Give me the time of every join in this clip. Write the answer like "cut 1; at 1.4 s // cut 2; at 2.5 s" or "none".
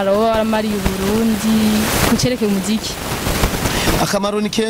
none